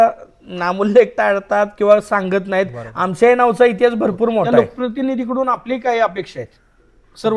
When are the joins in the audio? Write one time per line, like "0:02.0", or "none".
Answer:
0:04.5